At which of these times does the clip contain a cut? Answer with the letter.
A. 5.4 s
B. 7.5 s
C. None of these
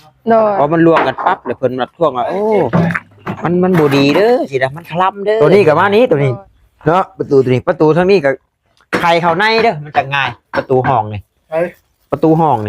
A